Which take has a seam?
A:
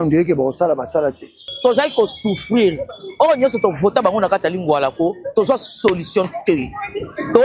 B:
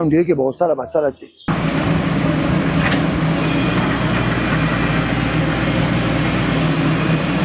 A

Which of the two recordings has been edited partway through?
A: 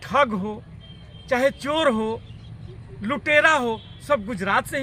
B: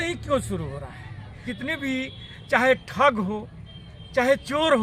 B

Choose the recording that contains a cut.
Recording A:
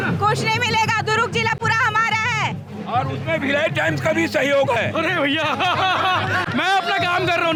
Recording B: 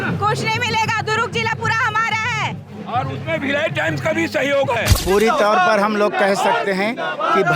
B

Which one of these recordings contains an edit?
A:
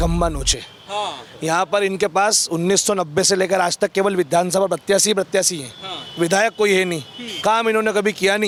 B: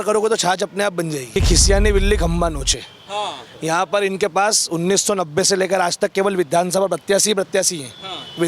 B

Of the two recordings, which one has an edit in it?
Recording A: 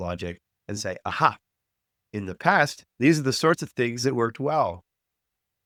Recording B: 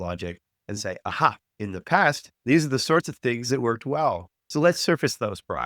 B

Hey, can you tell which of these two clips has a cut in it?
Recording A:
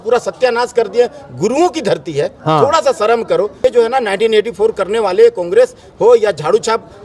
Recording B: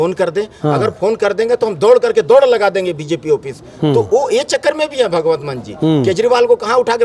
A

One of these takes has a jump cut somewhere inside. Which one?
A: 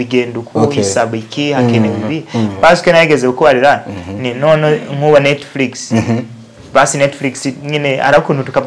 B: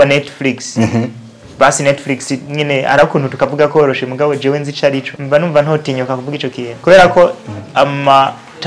B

